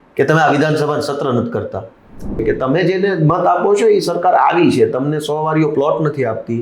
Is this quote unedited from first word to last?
no; 1 cut; at 2.4 s

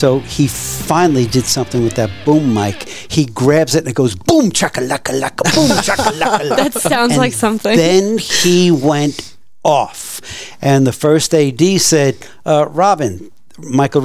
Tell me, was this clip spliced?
no; 0 cuts

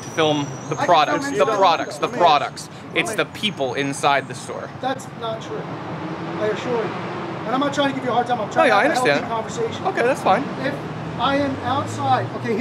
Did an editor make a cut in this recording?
no; 0 cuts

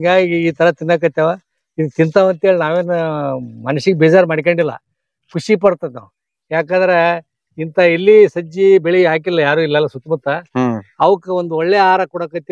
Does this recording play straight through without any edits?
yes; 0 cuts

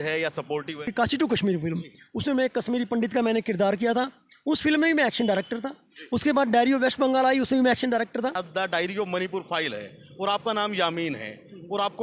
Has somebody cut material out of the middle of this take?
yes; 2 cuts; at 0.9 s, 8.4 s

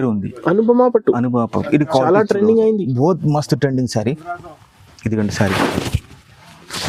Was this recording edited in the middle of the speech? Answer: no; 0 cuts

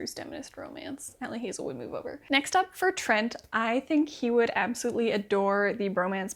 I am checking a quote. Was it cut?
no; 0 cuts

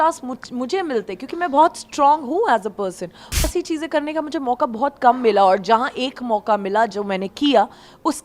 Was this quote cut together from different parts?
yes; 1 cut; at 3.4 s

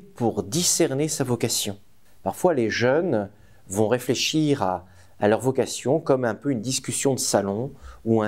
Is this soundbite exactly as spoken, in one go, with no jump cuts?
yes; 0 cuts

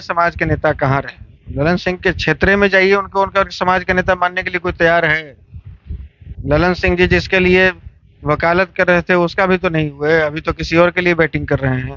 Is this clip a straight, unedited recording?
yes; 0 cuts

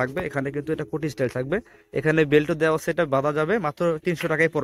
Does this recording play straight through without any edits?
yes; 0 cuts

